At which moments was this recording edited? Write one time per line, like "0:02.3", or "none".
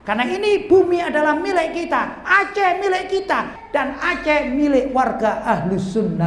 0:03.5